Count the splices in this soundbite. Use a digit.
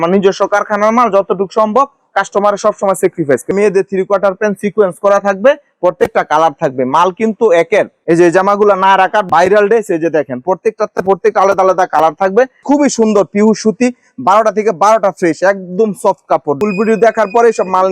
4